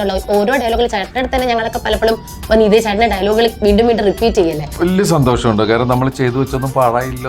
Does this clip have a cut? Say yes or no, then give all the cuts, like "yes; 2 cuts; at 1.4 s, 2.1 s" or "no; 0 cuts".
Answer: yes; 1 cut; at 4.7 s